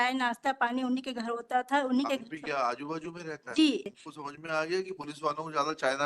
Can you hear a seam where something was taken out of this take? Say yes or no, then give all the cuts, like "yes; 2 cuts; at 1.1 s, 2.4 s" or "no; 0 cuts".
yes; 1 cut; at 3.9 s